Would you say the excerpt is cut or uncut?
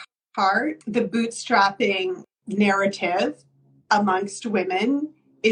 cut